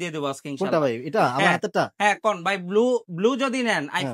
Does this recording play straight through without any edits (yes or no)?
yes